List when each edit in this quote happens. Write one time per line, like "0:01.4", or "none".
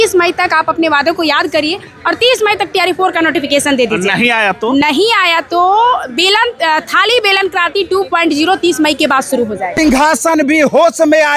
0:09.7